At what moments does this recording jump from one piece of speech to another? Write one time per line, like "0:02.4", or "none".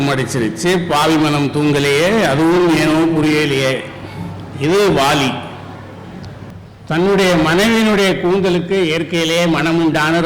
0:06.5